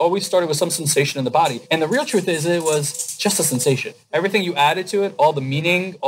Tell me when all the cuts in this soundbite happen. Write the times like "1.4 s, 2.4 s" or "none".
1.6 s, 3.9 s